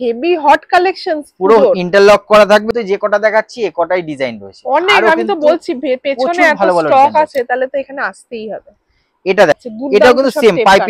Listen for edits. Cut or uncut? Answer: cut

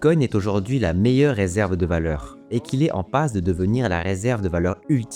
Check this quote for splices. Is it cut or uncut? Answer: cut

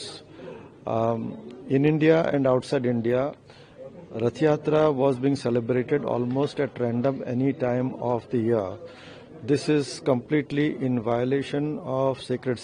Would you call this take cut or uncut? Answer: uncut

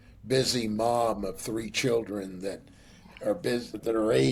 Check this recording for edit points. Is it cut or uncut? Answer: uncut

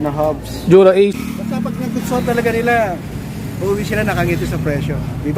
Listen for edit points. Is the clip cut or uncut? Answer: cut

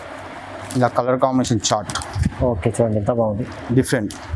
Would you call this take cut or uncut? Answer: uncut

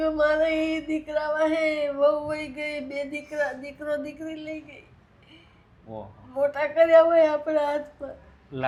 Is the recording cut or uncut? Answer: uncut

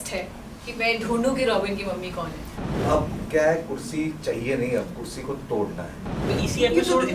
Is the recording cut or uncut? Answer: cut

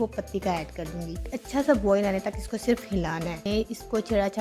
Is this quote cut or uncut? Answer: cut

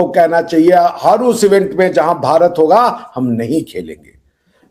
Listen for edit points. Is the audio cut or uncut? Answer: uncut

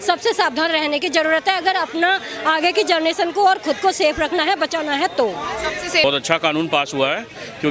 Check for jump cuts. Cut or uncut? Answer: cut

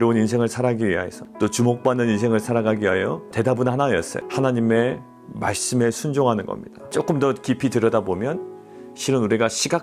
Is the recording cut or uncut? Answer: cut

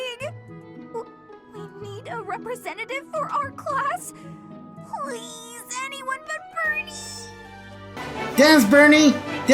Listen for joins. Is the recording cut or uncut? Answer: cut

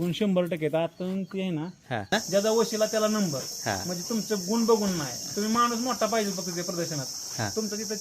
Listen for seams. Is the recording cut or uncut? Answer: cut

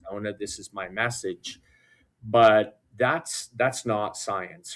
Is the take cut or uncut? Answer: uncut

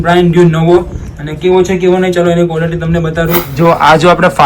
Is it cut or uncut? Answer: cut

